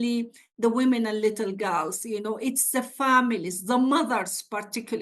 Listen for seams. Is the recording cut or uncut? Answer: uncut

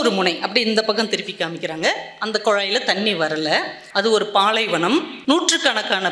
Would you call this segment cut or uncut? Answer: cut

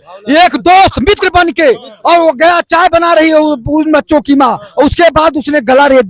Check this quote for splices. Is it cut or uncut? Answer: uncut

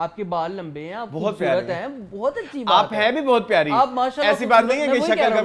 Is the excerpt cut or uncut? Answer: uncut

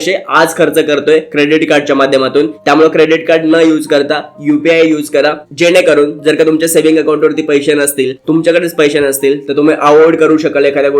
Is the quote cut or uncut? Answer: uncut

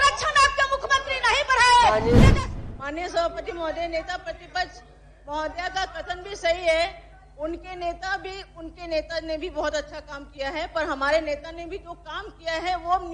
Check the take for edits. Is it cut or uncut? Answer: cut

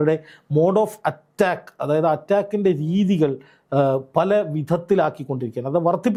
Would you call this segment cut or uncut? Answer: uncut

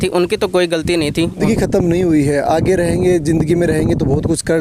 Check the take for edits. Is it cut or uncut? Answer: cut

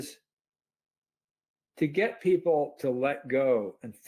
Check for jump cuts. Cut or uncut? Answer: uncut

